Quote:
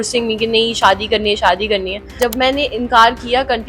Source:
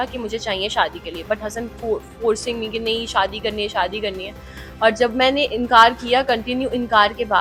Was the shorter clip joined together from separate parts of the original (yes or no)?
yes